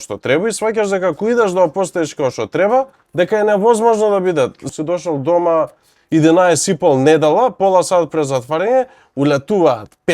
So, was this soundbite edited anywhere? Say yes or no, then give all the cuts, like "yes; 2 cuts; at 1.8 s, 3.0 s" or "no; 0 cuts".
yes; 1 cut; at 4.7 s